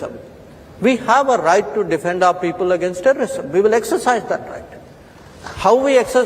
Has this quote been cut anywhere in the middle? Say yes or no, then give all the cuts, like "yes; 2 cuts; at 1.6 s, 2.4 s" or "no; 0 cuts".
yes; 1 cut; at 3.4 s